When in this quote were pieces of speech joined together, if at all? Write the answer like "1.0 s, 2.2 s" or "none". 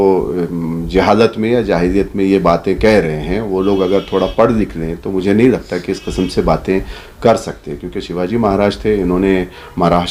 none